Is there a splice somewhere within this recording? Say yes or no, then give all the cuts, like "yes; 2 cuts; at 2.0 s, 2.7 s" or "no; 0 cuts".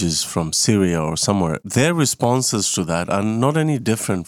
yes; 1 cut; at 1.6 s